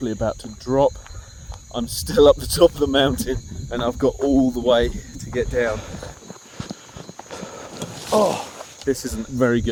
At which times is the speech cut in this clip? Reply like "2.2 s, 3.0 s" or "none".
none

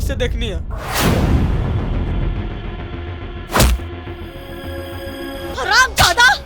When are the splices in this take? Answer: 5.5 s

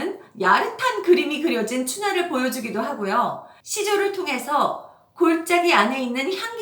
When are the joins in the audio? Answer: none

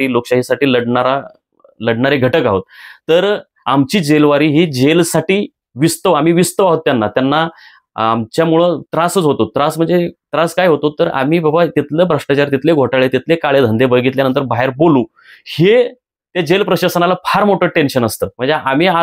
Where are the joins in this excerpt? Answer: none

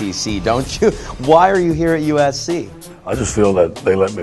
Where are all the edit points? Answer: none

